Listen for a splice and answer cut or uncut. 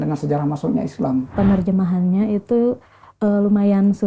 cut